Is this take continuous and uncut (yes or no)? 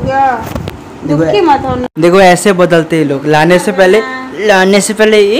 yes